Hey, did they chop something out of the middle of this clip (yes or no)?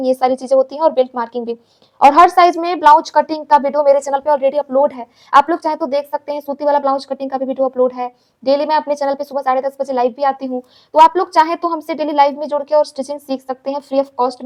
no